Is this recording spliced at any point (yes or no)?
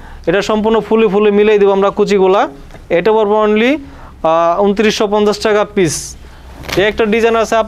no